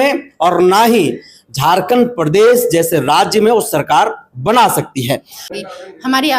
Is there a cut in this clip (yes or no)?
yes